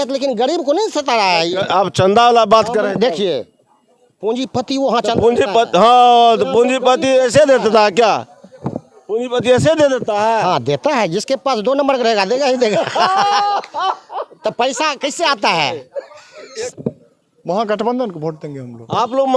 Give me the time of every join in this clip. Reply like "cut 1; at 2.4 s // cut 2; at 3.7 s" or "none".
cut 1; at 16.5 s